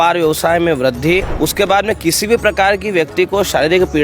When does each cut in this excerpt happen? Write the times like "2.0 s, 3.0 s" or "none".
1.3 s